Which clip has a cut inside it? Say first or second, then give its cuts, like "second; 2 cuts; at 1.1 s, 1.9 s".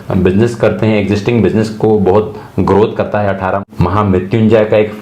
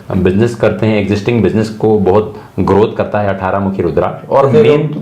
first; 1 cut; at 3.7 s